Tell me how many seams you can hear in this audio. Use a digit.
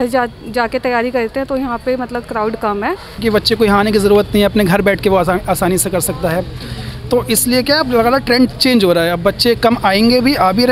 1